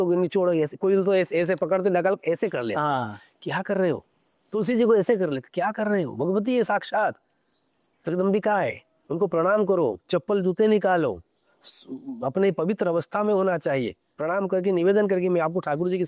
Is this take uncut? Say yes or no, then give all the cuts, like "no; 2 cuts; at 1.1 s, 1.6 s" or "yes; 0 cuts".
yes; 0 cuts